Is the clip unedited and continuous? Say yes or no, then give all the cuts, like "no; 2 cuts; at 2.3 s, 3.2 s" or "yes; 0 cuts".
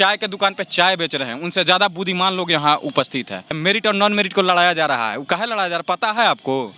no; 1 cut; at 3.6 s